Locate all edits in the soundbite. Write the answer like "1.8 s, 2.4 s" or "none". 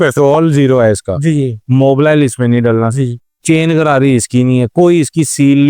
none